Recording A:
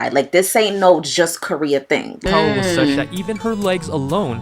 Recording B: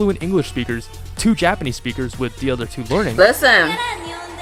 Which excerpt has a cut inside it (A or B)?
A